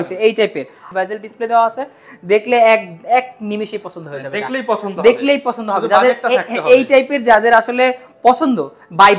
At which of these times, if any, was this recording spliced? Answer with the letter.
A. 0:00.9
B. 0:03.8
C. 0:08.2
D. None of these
A